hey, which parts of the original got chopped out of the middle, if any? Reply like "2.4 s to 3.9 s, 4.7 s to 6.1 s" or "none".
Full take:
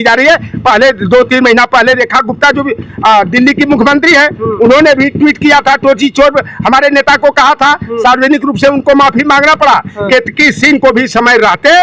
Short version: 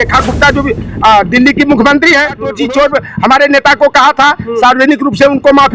4.5 s to 6.0 s